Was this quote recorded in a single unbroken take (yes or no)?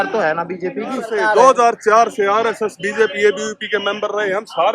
no